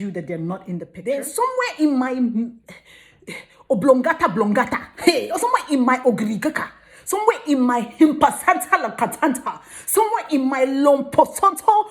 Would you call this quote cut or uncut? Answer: cut